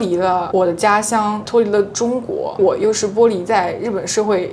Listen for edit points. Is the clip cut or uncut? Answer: cut